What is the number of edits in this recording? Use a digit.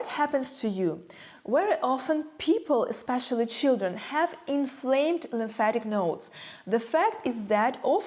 0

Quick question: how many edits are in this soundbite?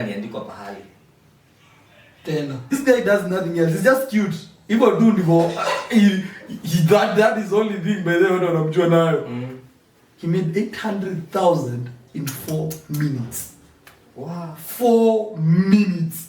1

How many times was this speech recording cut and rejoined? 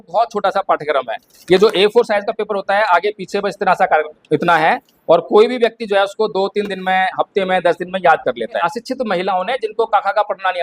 1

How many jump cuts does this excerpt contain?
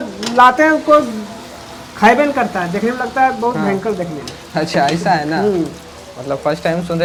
0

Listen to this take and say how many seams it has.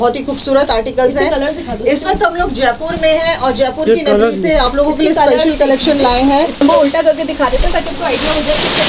1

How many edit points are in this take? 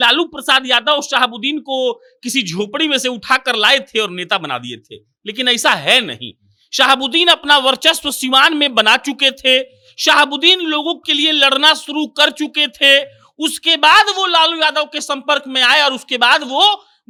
0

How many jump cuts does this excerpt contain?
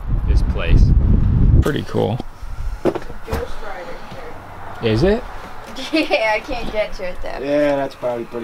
1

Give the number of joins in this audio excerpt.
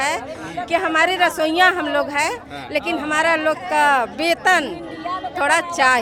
0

